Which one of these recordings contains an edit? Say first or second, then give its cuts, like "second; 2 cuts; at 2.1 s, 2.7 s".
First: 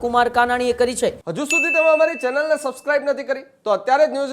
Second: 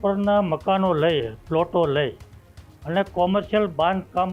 first; 1 cut; at 1.2 s